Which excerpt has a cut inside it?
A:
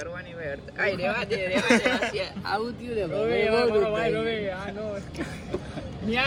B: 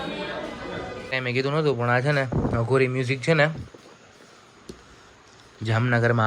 B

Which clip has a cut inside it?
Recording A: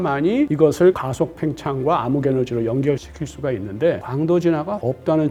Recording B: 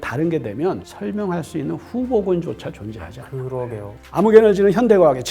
B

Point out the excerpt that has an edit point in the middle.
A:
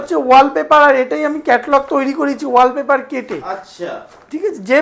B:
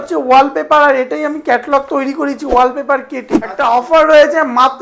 B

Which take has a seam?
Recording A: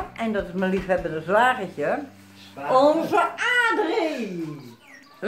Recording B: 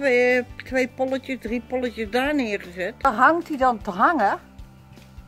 B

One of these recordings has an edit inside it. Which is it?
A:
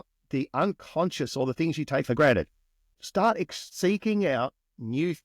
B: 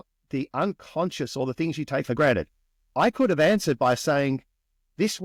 A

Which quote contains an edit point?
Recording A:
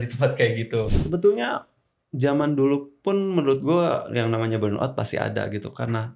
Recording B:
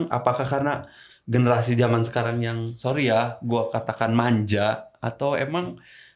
A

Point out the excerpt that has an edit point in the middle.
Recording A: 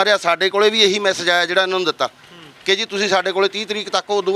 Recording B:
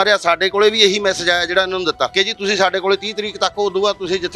B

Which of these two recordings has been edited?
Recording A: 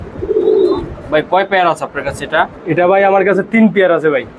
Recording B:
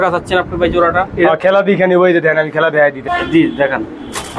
B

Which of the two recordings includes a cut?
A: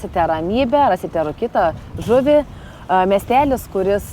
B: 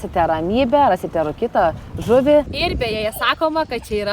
B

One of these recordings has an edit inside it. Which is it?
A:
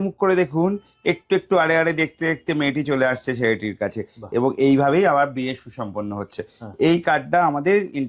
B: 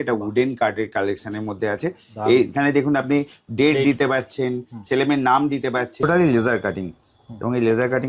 B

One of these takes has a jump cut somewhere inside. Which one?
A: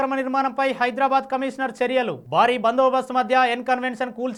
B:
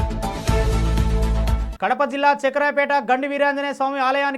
B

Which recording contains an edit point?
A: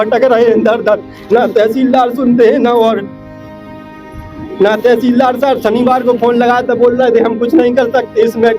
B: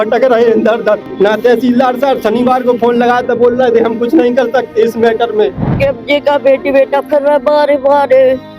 B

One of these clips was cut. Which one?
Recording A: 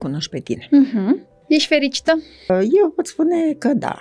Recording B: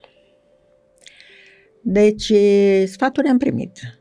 A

